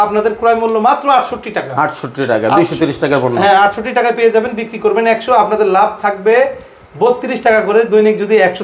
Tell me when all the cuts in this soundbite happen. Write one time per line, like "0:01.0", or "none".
none